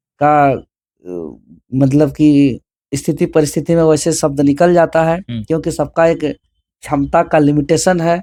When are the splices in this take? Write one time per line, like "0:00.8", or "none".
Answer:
none